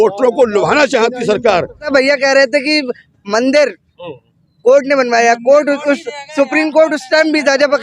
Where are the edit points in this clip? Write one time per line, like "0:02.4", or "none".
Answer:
0:01.8